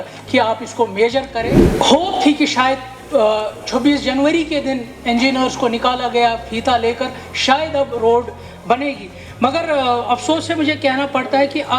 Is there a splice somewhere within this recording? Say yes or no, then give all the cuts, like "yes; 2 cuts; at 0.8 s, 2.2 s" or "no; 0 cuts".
yes; 1 cut; at 1.6 s